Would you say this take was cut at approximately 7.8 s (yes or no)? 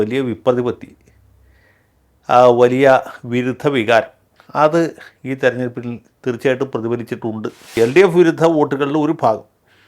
yes